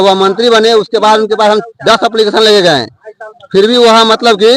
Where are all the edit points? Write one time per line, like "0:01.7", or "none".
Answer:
none